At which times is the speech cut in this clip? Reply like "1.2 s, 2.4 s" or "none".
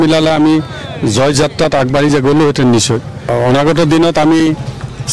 3.3 s